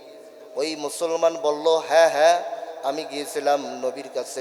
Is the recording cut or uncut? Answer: uncut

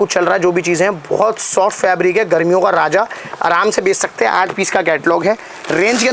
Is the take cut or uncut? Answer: uncut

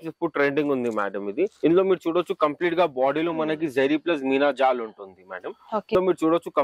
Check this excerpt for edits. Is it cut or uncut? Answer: cut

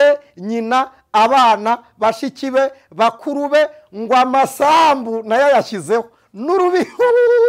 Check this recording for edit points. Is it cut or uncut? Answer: uncut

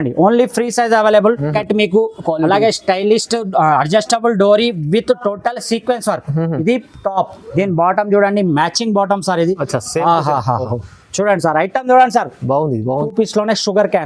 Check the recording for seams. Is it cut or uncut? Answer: cut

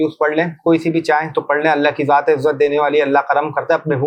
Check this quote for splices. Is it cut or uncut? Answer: uncut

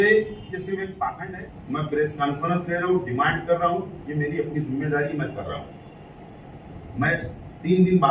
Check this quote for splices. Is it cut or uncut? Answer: cut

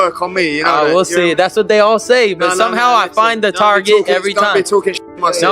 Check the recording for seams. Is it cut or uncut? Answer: uncut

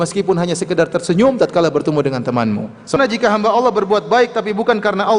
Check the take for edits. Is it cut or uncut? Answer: cut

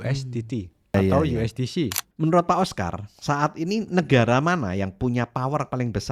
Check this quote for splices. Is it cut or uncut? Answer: cut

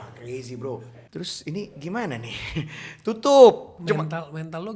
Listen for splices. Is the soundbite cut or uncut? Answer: cut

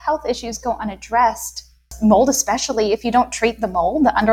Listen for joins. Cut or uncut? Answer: cut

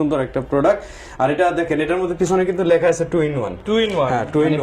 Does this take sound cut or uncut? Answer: uncut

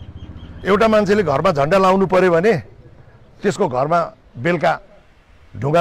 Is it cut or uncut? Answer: uncut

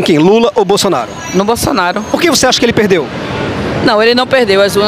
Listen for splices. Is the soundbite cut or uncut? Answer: cut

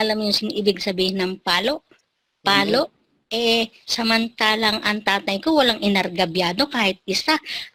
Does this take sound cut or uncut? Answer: uncut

